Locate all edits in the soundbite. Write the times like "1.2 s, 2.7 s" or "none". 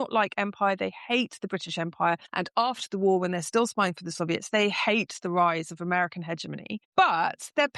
2.3 s, 6.8 s